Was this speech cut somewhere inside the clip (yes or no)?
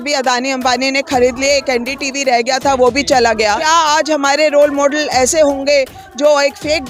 yes